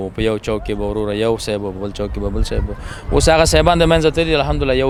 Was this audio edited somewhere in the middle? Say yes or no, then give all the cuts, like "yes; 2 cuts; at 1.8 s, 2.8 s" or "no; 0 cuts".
no; 0 cuts